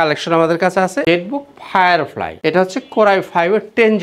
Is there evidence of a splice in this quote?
yes; 2 cuts; at 1.0 s, 2.3 s

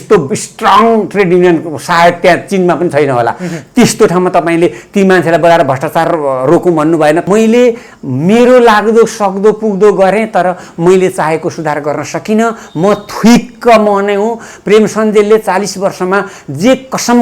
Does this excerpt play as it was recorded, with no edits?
no; 1 cut; at 7.2 s

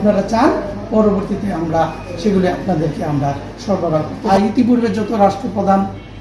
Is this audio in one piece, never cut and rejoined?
no; 1 cut; at 4.2 s

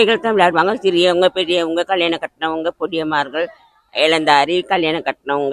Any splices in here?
no; 0 cuts

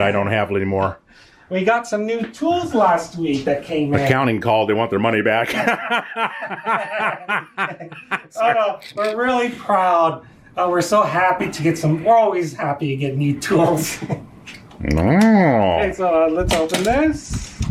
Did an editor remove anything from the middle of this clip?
no; 0 cuts

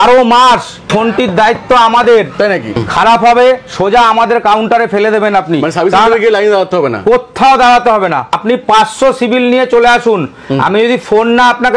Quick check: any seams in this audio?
yes; 3 cuts; at 0.9 s, 2.8 s, 8.3 s

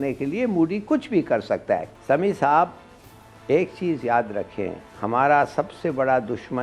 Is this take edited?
yes; 1 cut; at 2.0 s

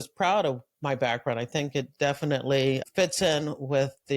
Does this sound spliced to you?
yes; 1 cut; at 2.8 s

